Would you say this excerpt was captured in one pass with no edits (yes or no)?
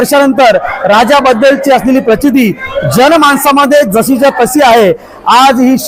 yes